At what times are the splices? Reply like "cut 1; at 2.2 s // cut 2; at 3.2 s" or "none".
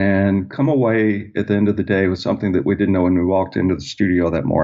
none

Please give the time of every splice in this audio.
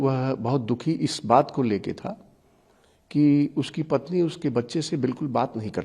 none

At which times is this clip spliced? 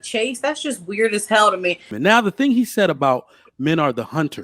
cut 1; at 1.9 s

